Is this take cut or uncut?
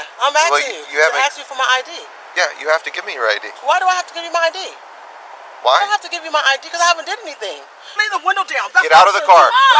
cut